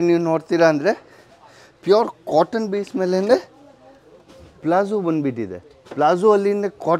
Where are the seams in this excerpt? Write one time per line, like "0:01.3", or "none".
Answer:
none

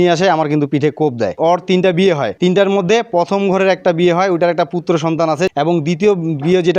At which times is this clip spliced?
0:01.4
0:02.3
0:05.5

